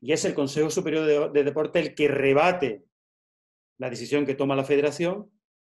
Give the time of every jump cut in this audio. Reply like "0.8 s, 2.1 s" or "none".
none